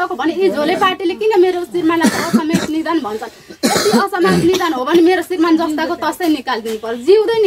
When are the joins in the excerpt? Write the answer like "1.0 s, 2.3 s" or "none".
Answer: none